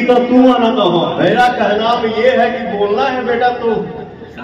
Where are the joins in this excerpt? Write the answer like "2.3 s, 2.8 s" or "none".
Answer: 1.1 s